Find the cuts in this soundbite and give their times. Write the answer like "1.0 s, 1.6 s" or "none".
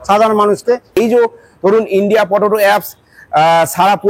0.9 s